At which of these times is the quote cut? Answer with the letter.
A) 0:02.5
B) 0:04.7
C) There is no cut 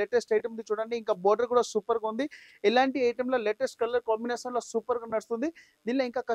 C